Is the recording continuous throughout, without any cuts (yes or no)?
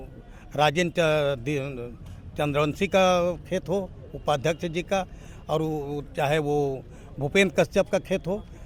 yes